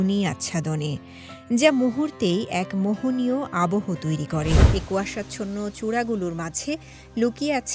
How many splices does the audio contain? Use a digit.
1